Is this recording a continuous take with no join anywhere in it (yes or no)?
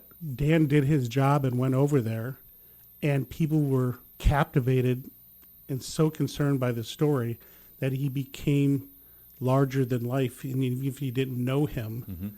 no